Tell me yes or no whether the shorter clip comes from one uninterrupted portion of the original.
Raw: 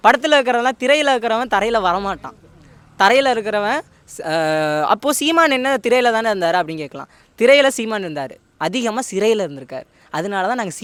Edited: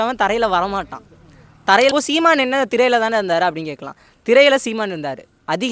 no